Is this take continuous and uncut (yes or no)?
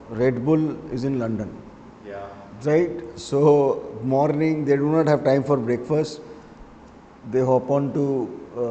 yes